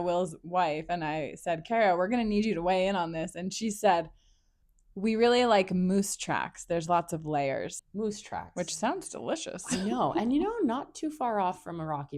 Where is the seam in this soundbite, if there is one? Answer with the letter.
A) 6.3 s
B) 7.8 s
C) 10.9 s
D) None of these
B